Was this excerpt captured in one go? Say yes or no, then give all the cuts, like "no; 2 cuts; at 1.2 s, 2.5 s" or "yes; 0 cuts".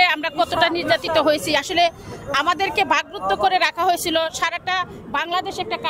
yes; 0 cuts